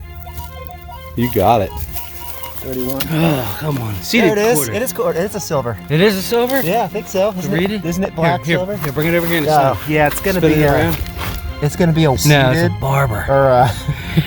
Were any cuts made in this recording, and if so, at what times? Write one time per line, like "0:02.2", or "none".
0:12.2